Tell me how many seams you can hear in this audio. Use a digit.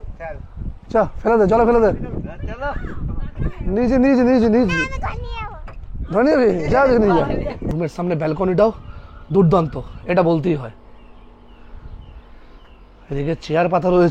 1